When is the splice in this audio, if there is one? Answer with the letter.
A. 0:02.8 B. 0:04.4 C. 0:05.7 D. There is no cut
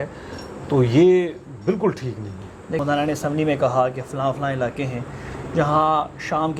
A